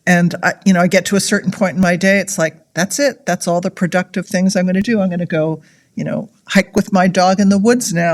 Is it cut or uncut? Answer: uncut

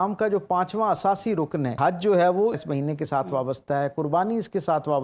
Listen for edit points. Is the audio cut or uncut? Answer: cut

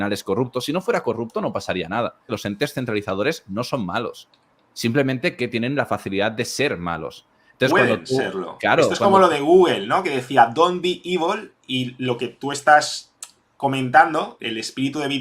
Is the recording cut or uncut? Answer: cut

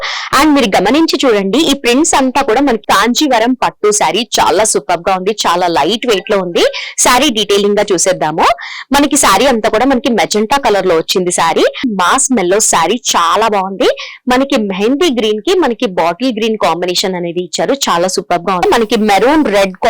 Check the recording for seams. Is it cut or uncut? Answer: cut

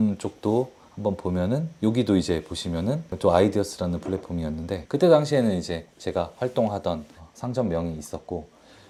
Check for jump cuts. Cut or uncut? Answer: uncut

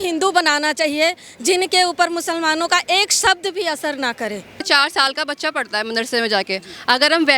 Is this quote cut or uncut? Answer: cut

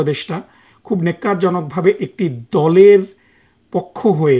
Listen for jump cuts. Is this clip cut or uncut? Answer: uncut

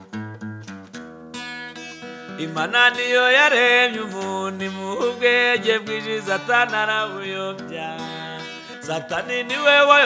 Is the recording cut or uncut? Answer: cut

